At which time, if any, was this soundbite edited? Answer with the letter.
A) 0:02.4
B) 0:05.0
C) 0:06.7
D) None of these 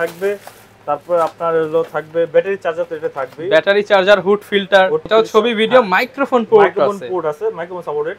B